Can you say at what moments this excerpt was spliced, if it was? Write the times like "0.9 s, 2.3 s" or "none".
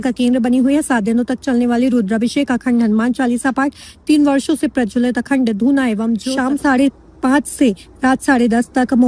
6.3 s